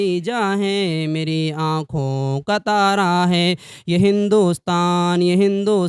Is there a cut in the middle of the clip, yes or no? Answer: no